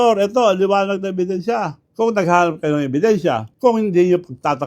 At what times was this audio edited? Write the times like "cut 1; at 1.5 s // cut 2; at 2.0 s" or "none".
cut 1; at 1.8 s // cut 2; at 3.5 s